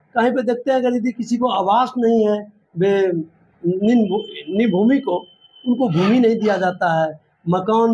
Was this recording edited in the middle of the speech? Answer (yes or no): no